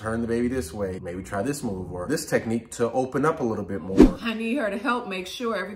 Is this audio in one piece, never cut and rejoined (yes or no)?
no